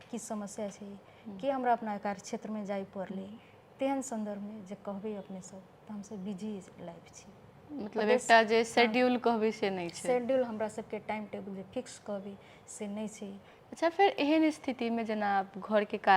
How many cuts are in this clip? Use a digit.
1